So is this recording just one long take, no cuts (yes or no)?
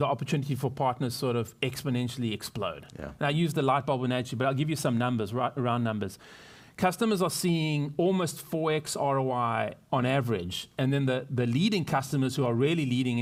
yes